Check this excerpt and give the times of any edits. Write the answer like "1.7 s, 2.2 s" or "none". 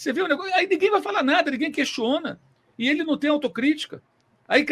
none